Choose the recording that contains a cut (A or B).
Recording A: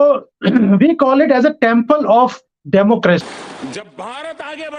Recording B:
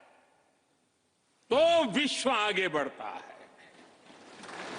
A